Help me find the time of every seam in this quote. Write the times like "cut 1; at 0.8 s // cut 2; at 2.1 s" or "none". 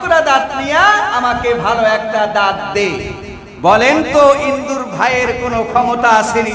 none